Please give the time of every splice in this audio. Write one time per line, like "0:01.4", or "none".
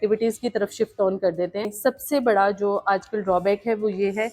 0:01.7